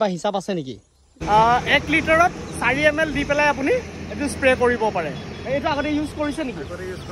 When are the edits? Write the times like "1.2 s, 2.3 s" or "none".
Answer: 1.1 s